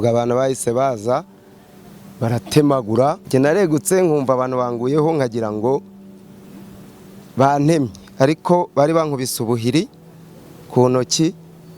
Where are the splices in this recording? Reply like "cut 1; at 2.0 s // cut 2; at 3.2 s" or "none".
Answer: cut 1; at 3.2 s